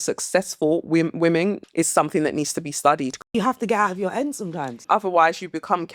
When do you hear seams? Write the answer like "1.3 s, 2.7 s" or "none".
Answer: 1.6 s, 3.3 s, 4.8 s